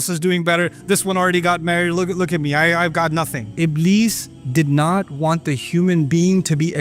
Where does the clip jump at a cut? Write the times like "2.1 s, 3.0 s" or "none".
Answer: 3.5 s